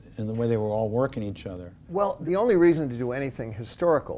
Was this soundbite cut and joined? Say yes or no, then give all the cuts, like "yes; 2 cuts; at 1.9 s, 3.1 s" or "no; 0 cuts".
yes; 1 cut; at 2.2 s